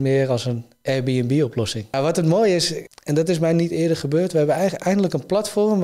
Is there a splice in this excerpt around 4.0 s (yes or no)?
no